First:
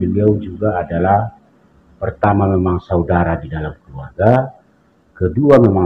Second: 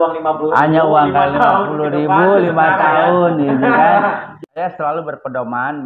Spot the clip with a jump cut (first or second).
second